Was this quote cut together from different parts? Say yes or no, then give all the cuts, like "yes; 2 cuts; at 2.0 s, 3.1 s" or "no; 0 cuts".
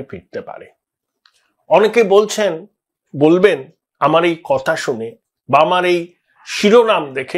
no; 0 cuts